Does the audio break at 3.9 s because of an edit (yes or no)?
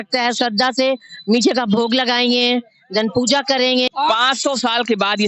yes